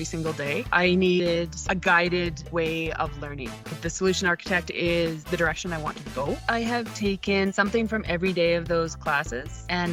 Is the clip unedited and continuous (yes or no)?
yes